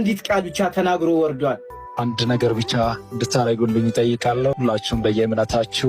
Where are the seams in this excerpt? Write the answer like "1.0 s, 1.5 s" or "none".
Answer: 1.7 s, 4.6 s